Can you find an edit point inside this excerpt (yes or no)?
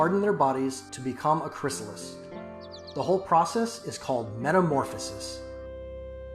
yes